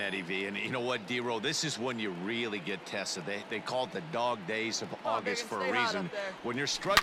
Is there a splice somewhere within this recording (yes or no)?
no